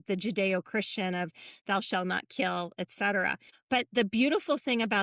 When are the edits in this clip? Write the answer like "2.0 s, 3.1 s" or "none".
3.5 s